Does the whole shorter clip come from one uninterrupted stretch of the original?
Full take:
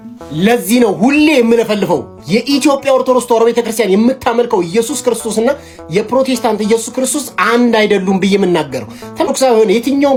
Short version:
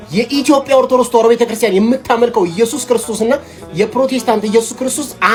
yes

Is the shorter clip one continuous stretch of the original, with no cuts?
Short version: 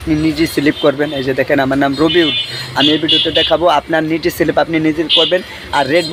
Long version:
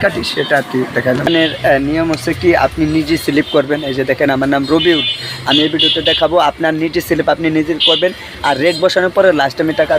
yes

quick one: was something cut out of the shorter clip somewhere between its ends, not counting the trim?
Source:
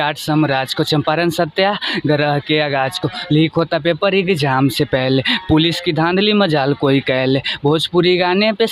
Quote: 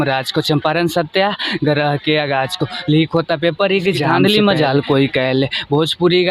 yes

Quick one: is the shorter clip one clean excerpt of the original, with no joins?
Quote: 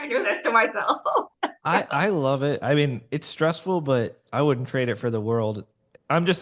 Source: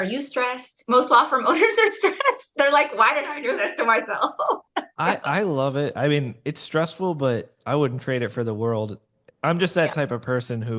yes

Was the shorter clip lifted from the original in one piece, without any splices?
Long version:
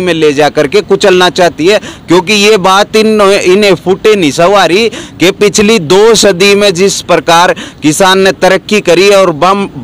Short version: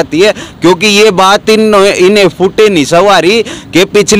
yes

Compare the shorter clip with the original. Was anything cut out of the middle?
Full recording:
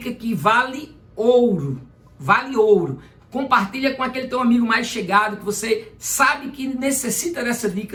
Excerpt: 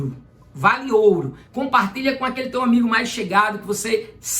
yes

